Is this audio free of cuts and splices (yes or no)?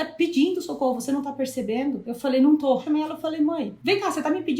no